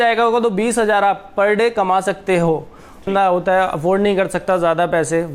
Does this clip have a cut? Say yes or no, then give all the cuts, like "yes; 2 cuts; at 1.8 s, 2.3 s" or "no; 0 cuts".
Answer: yes; 1 cut; at 3.1 s